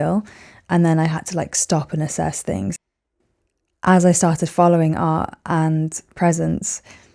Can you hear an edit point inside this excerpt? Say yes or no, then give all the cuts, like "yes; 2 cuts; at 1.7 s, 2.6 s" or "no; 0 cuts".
no; 0 cuts